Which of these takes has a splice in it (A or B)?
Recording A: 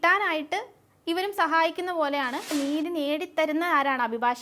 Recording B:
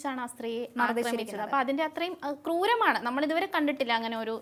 A